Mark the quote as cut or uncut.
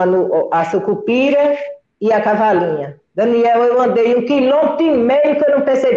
uncut